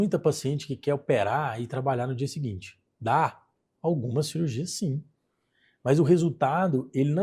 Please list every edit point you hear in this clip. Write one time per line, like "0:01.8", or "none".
none